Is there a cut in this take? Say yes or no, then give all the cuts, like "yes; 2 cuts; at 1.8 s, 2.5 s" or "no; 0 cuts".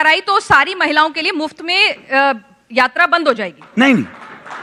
no; 0 cuts